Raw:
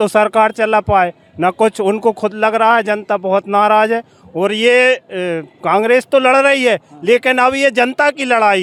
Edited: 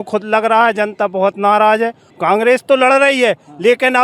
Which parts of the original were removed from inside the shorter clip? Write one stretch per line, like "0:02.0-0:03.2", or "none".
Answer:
0:04.2-0:05.5